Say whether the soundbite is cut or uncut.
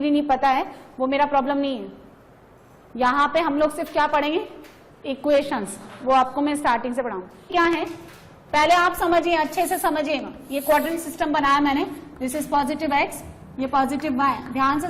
cut